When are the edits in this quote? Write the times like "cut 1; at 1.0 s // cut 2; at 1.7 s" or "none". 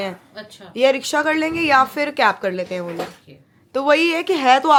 none